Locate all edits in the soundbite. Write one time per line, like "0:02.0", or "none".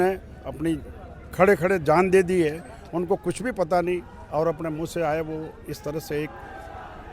none